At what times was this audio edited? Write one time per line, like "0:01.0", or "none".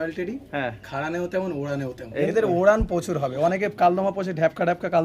0:02.3